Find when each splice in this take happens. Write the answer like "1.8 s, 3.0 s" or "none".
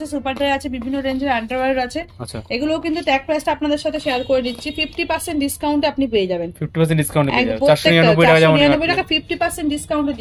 none